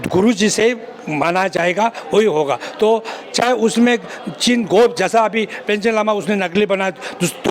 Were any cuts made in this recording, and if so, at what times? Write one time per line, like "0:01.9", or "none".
none